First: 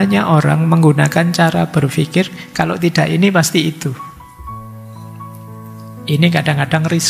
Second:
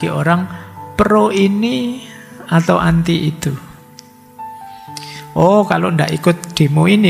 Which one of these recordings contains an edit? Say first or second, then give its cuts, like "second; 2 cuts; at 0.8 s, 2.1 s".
first; 2 cuts; at 4.4 s, 6.1 s